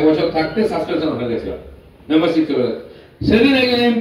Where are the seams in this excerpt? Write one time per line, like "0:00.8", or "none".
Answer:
none